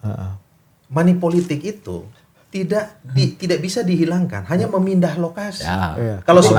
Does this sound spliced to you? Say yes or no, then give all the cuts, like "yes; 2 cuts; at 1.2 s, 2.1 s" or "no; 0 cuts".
no; 0 cuts